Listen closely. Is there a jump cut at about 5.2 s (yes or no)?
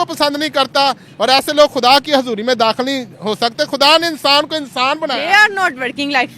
yes